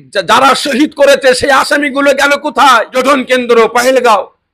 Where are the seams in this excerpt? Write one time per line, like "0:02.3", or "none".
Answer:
0:02.9